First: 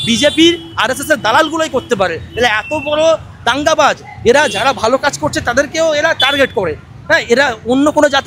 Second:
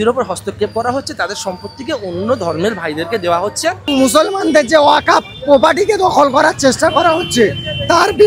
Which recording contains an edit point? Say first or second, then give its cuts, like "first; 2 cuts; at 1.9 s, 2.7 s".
second; 1 cut; at 3.9 s